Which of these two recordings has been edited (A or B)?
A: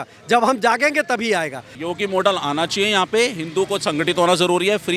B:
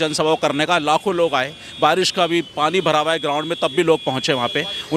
A